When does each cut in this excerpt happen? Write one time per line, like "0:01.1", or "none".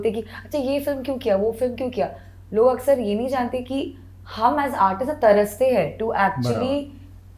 none